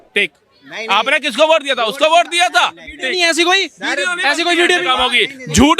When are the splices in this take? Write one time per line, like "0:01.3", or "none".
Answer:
none

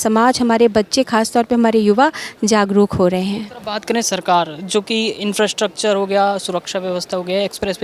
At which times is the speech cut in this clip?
none

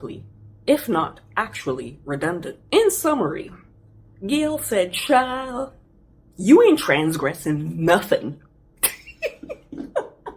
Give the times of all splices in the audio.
0:02.6

